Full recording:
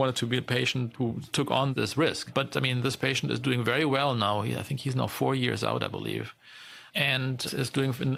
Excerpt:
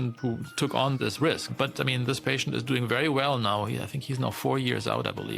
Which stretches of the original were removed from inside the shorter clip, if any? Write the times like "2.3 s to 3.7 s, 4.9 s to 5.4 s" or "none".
none